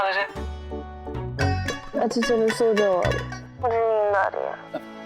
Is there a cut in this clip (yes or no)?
yes